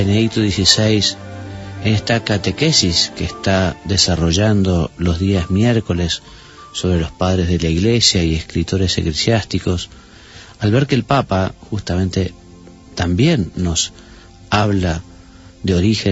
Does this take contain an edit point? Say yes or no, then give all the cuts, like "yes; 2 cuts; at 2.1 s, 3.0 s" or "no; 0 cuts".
yes; 1 cut; at 14.5 s